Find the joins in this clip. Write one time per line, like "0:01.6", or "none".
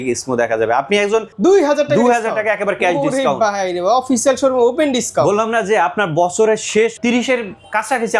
0:01.3
0:06.9